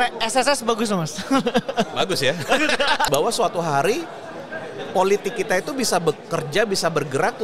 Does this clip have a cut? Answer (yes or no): yes